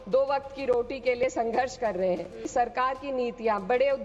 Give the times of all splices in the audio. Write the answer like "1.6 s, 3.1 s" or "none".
2.4 s